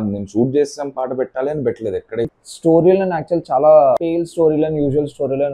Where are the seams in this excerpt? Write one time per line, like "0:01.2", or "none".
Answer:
0:02.3
0:04.2